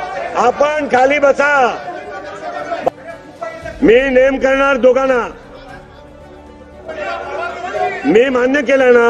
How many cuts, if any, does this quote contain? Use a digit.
1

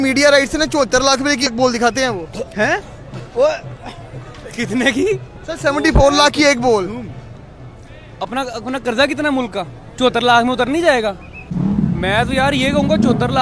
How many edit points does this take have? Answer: 3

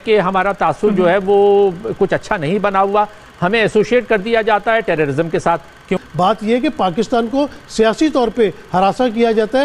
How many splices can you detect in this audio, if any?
1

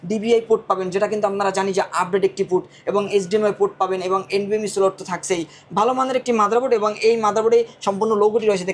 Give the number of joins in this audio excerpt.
0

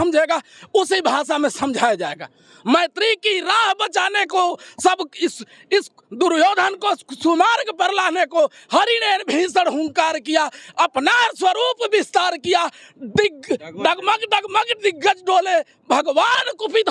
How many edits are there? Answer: 0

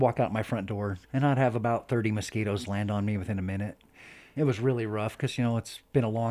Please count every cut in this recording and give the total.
2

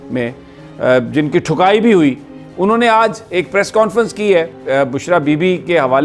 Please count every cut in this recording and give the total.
0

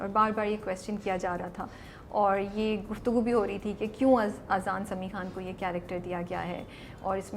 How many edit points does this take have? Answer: 0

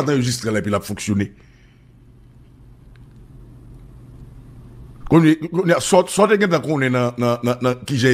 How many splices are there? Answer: 0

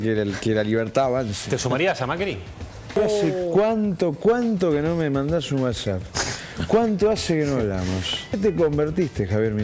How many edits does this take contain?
2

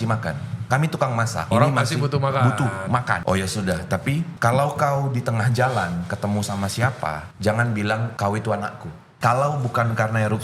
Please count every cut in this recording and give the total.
6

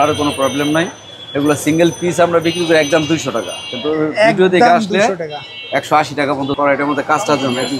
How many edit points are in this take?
1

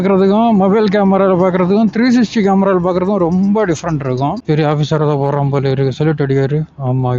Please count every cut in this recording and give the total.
1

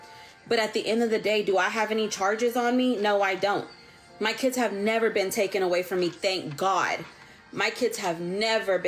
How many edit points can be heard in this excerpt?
0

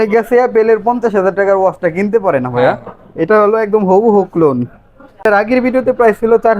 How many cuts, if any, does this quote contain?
1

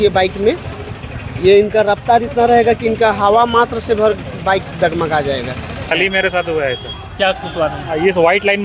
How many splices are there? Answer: 1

